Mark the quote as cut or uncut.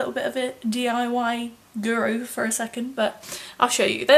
uncut